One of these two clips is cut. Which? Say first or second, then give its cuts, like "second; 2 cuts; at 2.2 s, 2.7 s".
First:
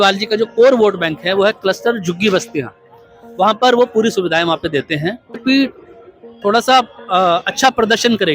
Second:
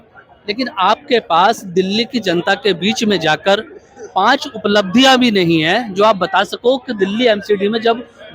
first; 1 cut; at 5.4 s